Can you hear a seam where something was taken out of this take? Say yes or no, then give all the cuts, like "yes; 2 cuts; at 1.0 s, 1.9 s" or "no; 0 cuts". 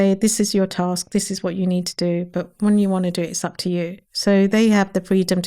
no; 0 cuts